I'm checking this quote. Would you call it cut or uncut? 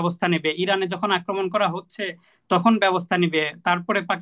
uncut